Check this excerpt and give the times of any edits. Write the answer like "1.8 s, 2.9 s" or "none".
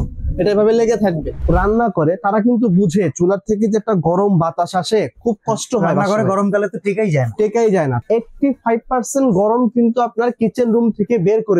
1.3 s, 8.0 s